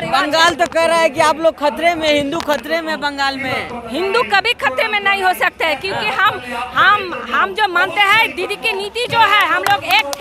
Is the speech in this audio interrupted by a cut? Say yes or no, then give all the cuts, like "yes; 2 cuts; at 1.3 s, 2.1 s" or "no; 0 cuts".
no; 0 cuts